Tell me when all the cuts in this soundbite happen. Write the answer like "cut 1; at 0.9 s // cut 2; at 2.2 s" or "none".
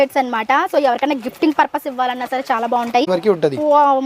cut 1; at 3.0 s